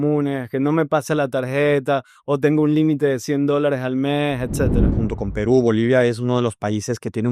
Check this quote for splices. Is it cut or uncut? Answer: cut